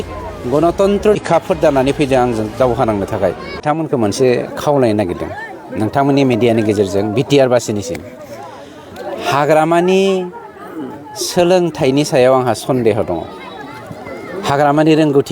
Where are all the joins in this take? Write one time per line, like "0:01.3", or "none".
0:01.2
0:03.6